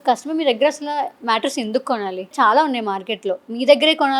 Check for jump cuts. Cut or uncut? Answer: cut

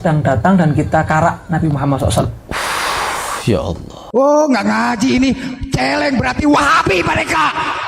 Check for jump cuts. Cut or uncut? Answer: cut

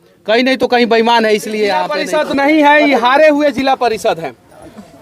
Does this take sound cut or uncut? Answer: cut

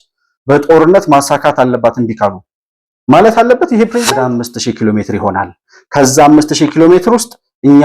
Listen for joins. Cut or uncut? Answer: cut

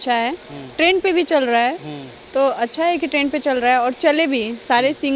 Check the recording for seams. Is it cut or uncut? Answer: uncut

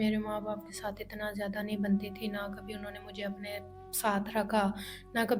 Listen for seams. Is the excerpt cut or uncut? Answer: uncut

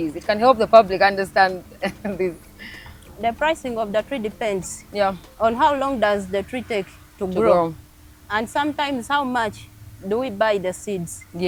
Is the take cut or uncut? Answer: uncut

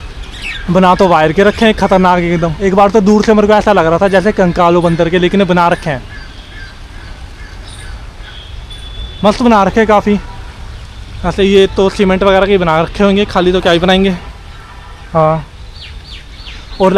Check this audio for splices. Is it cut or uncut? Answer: uncut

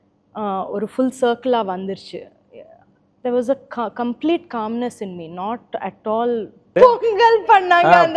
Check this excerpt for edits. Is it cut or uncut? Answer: cut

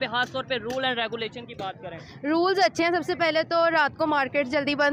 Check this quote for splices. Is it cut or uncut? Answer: uncut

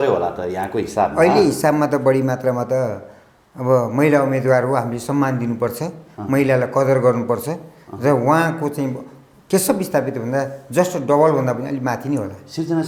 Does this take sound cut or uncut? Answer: uncut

